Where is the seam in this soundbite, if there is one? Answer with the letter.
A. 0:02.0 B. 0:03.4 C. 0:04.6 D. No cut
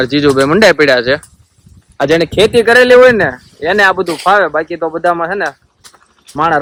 D